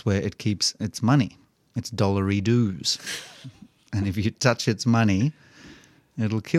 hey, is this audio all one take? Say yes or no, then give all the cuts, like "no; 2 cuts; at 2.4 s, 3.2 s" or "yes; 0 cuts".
yes; 0 cuts